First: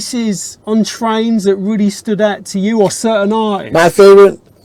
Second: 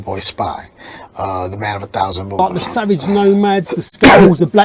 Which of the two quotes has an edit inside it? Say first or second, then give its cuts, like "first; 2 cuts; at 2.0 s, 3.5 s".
second; 1 cut; at 2.4 s